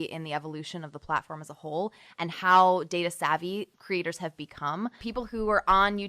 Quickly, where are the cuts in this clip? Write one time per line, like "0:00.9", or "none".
0:03.7
0:05.0